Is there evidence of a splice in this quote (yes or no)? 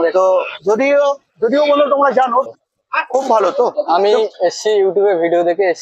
yes